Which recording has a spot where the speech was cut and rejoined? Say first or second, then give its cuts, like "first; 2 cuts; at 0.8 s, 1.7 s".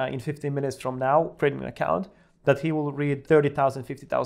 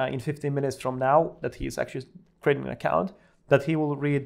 first; 2 cuts; at 1.3 s, 3.2 s